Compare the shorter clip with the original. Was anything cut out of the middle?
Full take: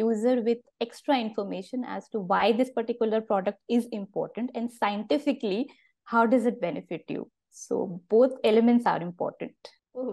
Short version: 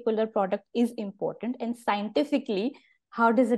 no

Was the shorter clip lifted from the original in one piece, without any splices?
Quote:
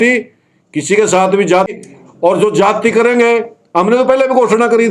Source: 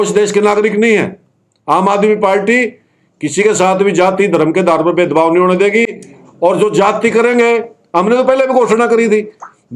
no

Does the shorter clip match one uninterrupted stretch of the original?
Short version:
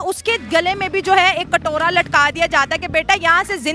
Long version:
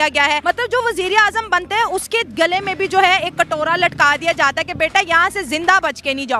yes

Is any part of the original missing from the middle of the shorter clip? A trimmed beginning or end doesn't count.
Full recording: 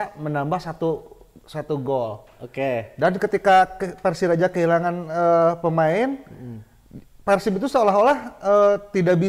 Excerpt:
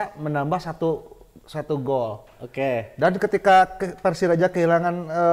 no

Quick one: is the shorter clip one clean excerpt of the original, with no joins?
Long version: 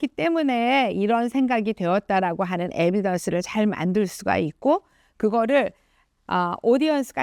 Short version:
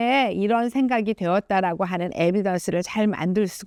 yes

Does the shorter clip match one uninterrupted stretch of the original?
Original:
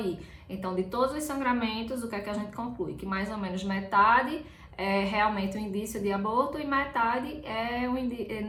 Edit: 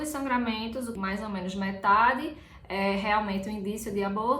no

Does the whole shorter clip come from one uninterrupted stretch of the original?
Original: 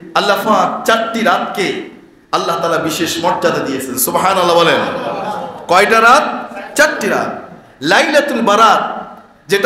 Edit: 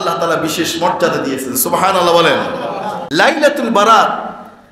no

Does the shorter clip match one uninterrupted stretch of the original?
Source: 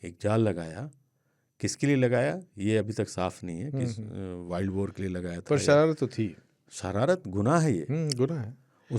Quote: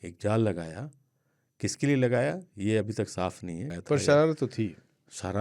no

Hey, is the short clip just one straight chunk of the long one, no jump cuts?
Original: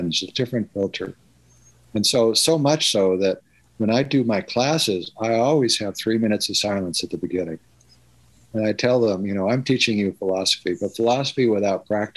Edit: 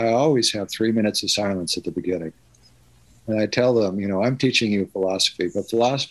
yes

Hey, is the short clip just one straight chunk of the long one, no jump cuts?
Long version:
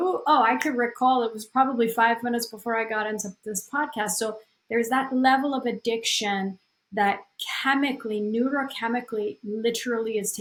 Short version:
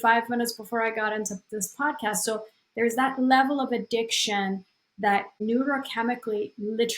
no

